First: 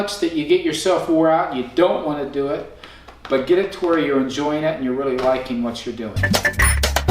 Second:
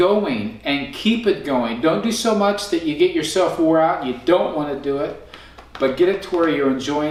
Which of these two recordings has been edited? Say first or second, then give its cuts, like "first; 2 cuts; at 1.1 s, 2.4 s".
first; 1 cut; at 6.2 s